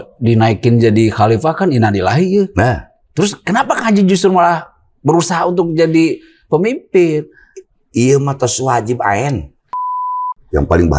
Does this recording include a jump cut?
yes; 1 cut; at 10.1 s

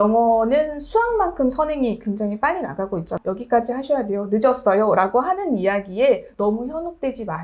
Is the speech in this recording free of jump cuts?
no; 1 cut; at 3.2 s

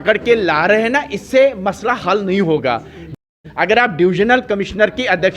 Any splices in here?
yes; 1 cut; at 3.1 s

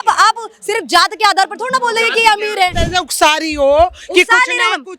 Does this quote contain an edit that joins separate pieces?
yes; 1 cut; at 2.8 s

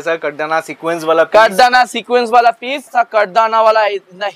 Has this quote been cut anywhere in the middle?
yes; 1 cut; at 2.9 s

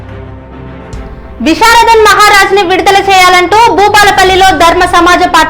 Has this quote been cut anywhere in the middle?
yes; 1 cut; at 1.0 s

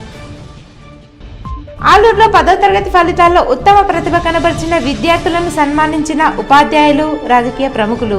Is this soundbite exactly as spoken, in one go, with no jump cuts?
no; 1 cut; at 1.4 s

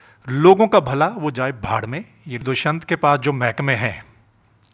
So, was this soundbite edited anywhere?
yes; 1 cut; at 2.4 s

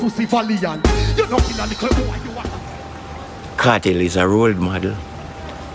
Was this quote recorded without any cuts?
no; 1 cut; at 2.3 s

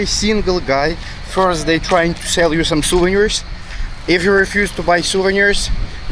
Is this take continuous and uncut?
yes; 0 cuts

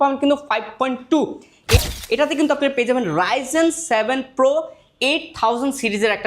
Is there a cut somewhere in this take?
yes; 1 cut; at 1.8 s

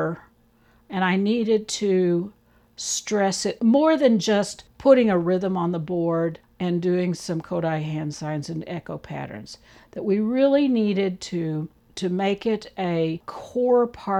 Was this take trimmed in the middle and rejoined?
no; 0 cuts

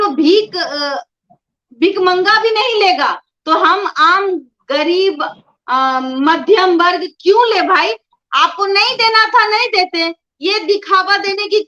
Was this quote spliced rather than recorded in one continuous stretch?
no; 0 cuts

